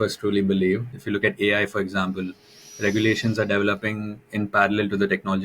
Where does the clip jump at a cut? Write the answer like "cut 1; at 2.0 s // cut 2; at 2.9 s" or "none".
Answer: cut 1; at 0.9 s